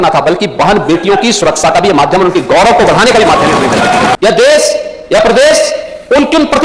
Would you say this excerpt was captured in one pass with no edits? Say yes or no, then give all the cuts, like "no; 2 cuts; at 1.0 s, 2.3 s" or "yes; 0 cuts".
no; 1 cut; at 4.2 s